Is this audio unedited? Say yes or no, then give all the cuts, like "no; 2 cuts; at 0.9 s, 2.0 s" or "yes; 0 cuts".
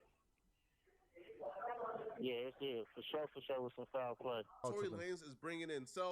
no; 1 cut; at 4.6 s